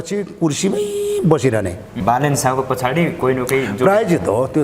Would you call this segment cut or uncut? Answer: cut